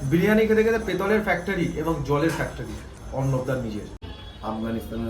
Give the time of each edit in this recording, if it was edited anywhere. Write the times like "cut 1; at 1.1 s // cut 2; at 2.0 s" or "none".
cut 1; at 4.0 s